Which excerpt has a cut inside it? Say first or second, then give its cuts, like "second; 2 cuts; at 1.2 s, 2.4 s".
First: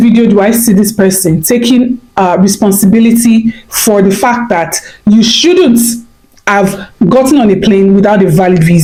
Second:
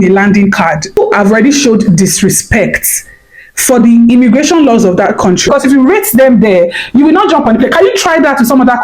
second; 2 cuts; at 1.0 s, 5.5 s